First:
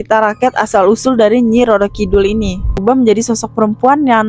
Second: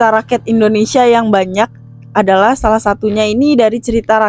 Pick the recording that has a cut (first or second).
first